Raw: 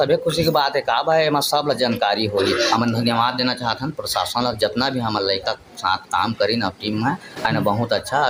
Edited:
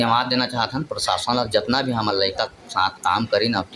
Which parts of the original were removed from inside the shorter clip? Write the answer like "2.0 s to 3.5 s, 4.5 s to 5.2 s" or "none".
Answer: none